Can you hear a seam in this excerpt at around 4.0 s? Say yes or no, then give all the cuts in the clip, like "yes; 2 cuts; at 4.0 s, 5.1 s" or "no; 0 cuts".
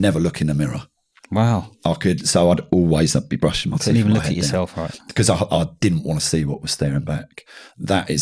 no; 1 cut; at 5.5 s